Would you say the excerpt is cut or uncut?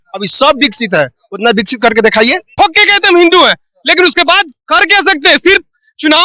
cut